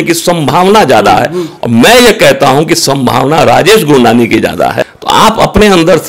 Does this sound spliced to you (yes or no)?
yes